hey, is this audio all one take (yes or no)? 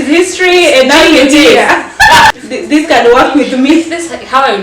no